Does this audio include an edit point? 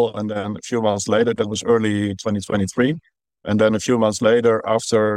no; 0 cuts

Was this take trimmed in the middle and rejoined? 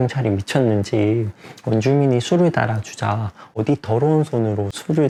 no; 0 cuts

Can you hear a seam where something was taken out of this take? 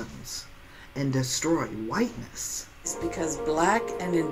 yes; 1 cut; at 2.9 s

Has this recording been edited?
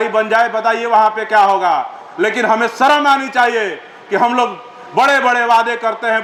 no; 0 cuts

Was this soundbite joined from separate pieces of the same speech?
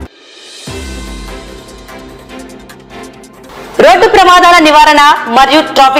no; 0 cuts

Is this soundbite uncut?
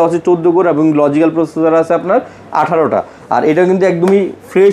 yes; 0 cuts

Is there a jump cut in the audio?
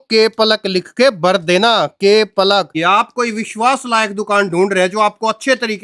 yes; 1 cut; at 2.7 s

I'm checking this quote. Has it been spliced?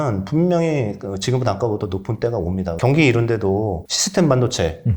yes; 2 cuts; at 2.7 s, 3.9 s

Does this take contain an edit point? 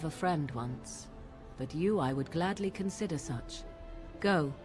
no; 0 cuts

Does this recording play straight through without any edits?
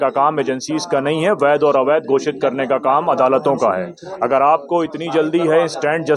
yes; 0 cuts

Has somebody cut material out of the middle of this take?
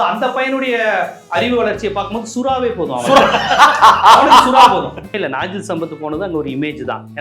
yes; 1 cut; at 5.1 s

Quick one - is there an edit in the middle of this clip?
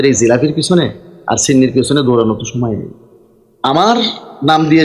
yes; 1 cut; at 3.5 s

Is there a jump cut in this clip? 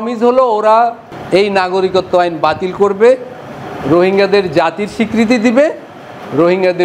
no; 0 cuts

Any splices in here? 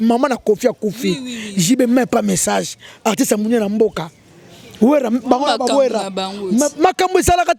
no; 0 cuts

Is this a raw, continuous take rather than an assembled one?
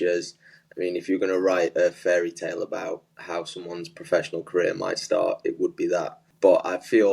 no; 1 cut; at 6.2 s

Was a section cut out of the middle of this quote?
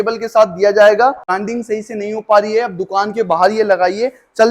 yes; 1 cut; at 1.3 s

